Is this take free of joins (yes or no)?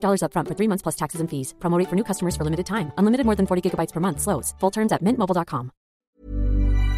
no